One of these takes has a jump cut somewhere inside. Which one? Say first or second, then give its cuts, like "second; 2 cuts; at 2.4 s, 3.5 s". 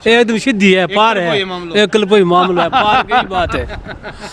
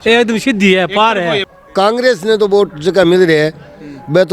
second; 1 cut; at 1.5 s